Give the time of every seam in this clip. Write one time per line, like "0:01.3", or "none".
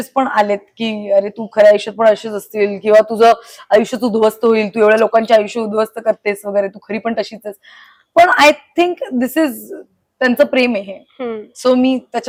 none